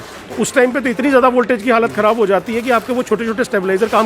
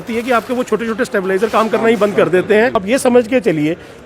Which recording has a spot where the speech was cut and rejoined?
second; 1 cut; at 2.8 s

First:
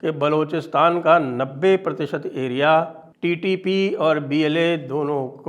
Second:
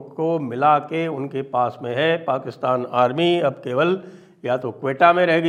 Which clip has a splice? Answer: first; 1 cut; at 3.0 s

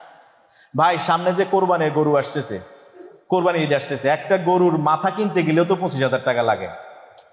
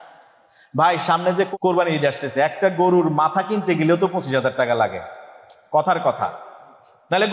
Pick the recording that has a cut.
second; 1 cut; at 1.5 s

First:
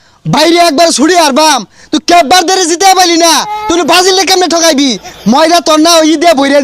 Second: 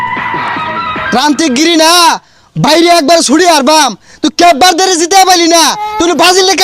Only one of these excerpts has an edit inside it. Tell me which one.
second; 1 cut; at 1.1 s

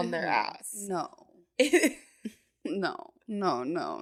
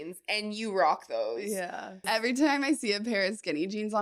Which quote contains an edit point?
second; 1 cut; at 2.0 s

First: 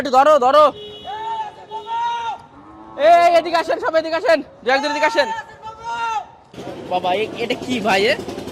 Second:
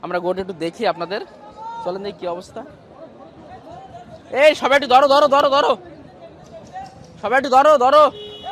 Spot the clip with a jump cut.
first; 1 cut; at 6.5 s

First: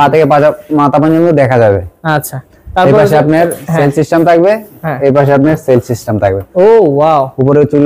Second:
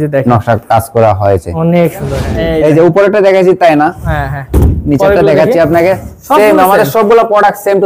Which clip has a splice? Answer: second; 1 cut; at 2.2 s

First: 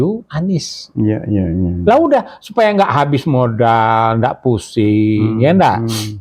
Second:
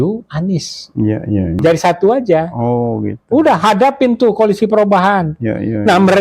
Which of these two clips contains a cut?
second; 1 cut; at 1.6 s

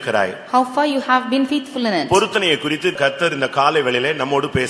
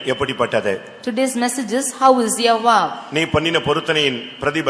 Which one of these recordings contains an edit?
first; 1 cut; at 3.0 s

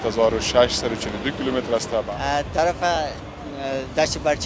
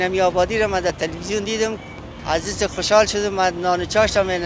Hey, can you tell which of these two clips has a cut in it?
first; 1 cut; at 2.0 s

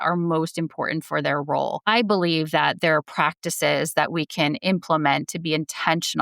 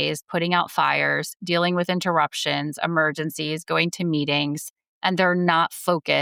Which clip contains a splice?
first; 1 cut; at 1.8 s

